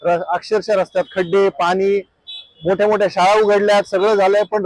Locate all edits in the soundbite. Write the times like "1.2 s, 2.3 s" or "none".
none